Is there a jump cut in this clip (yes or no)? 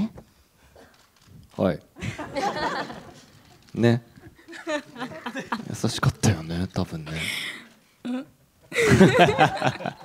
no